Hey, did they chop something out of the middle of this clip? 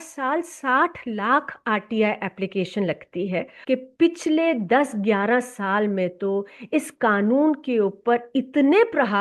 yes; 1 cut; at 3.5 s

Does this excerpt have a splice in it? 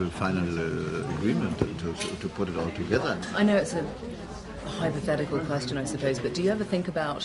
yes; 1 cut; at 3.6 s

